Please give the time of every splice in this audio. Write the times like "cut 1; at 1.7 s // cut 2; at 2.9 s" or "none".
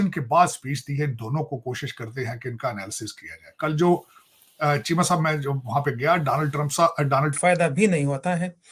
cut 1; at 7.3 s